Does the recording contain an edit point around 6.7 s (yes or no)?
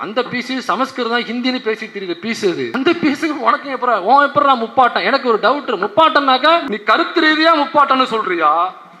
yes